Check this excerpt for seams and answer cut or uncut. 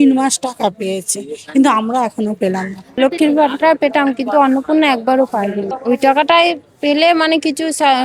cut